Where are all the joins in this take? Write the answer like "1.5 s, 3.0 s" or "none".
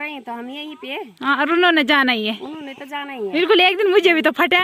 none